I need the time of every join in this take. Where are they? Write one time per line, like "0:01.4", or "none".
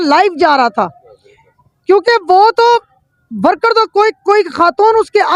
none